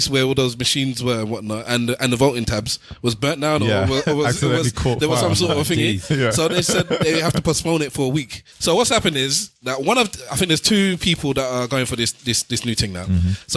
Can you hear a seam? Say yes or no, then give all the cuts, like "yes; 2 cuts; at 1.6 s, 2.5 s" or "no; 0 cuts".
yes; 1 cut; at 8.5 s